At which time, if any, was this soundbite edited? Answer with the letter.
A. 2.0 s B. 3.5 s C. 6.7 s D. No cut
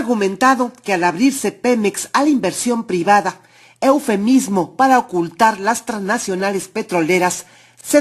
A